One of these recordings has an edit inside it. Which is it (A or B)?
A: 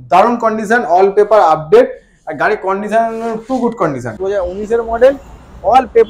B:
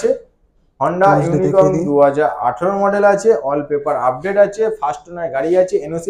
A